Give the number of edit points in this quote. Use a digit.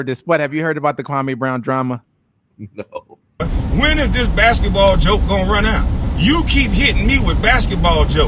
1